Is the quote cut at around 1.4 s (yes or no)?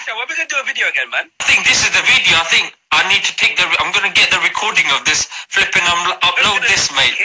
yes